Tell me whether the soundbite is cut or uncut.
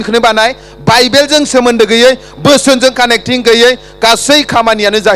uncut